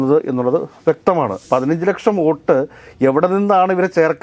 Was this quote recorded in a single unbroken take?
no; 1 cut; at 1.4 s

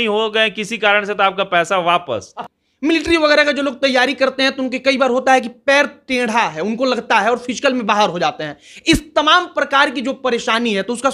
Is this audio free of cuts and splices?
no; 1 cut; at 2.4 s

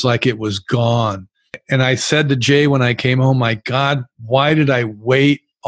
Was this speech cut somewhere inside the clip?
yes; 1 cut; at 1.5 s

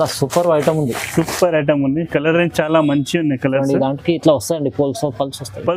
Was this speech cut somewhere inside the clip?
no; 0 cuts

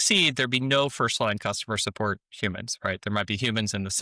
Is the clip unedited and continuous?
yes; 0 cuts

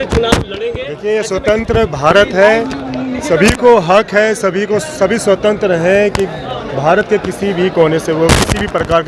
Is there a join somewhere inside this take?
no; 0 cuts

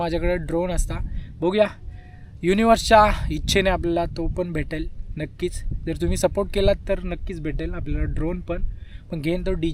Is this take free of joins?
yes; 0 cuts

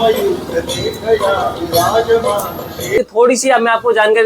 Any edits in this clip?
yes; 1 cut; at 3.0 s

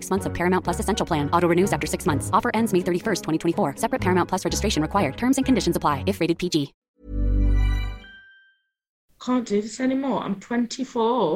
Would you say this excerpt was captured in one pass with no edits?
no; 1 cut; at 9.1 s

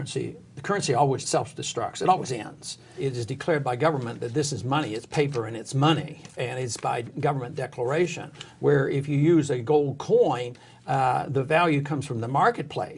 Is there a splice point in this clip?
yes; 2 cuts; at 1.2 s, 2.9 s

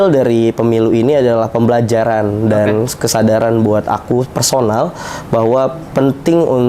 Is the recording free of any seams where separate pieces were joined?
yes; 0 cuts

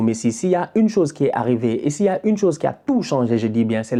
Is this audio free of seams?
yes; 0 cuts

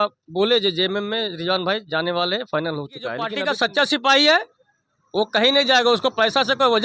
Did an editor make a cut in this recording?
yes; 1 cut; at 3.3 s

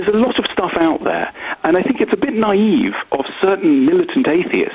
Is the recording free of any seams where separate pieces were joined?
yes; 0 cuts

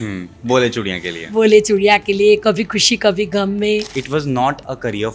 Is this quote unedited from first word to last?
no; 1 cut; at 3.9 s

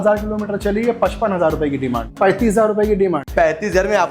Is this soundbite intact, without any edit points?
no; 2 cuts; at 2.1 s, 3.3 s

